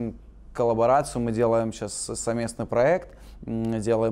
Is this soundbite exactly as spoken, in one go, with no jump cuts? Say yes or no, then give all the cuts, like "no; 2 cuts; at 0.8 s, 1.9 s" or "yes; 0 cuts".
yes; 0 cuts